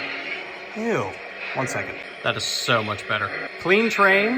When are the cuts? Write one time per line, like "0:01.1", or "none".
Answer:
0:02.1
0:03.5